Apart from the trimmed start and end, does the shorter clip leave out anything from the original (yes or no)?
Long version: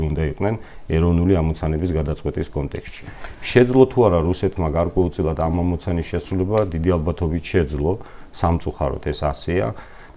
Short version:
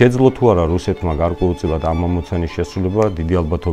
no